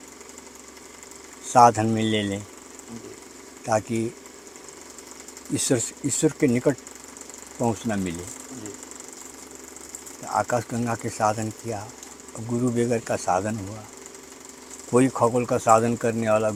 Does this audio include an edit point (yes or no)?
no